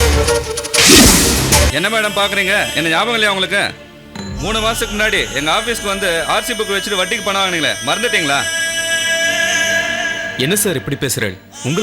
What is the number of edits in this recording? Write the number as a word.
one